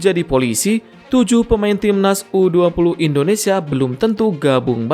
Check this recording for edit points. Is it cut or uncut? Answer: uncut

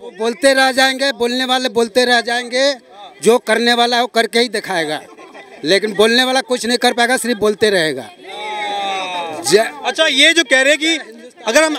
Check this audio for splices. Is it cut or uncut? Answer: uncut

